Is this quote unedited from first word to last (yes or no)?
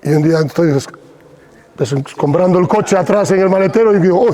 yes